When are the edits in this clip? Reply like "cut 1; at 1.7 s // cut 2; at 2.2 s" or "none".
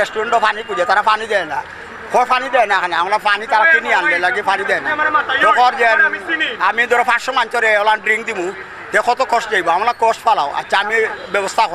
none